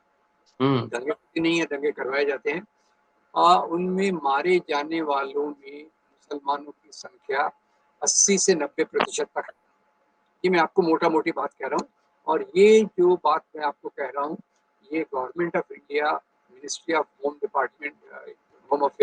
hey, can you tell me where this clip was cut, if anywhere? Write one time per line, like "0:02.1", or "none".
none

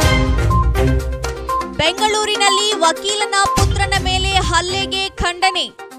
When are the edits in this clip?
0:01.7

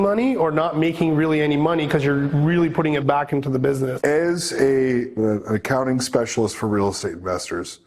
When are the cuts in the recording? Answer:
0:03.9
0:05.2

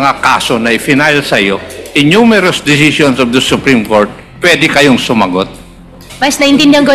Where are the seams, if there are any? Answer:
0:06.0

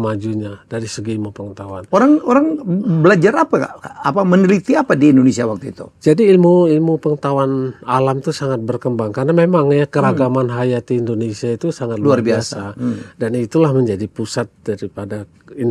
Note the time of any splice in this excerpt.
none

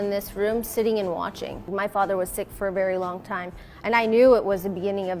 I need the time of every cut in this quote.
0:01.7

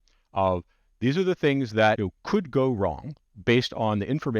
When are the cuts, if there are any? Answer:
0:02.1

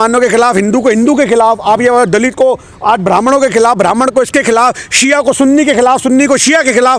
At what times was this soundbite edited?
none

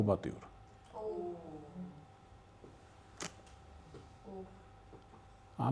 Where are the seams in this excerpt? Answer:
none

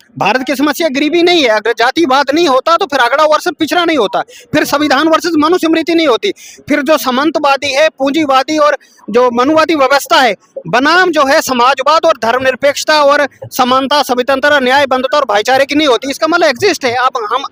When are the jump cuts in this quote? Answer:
none

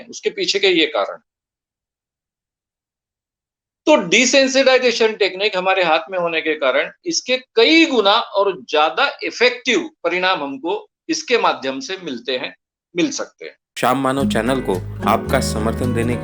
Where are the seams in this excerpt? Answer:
0:13.8

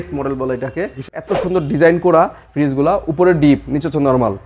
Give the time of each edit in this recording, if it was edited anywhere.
0:01.1

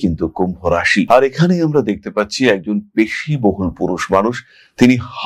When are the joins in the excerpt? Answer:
none

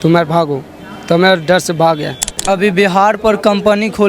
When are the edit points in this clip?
0:02.3

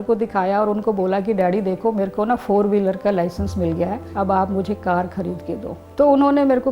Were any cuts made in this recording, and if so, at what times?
0:04.0
0:05.8

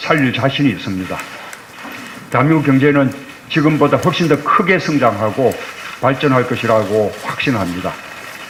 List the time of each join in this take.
none

